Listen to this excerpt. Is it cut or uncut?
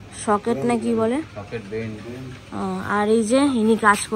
uncut